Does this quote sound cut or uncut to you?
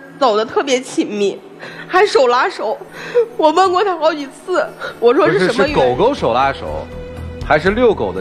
uncut